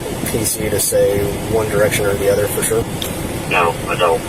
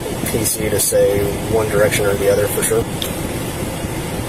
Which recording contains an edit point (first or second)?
first